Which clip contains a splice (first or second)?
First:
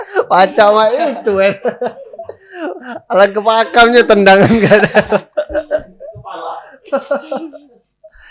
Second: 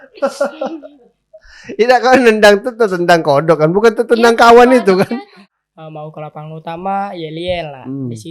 second